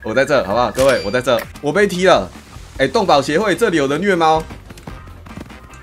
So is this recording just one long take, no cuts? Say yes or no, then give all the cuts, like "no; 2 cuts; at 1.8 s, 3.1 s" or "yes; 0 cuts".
no; 2 cuts; at 1.5 s, 4.5 s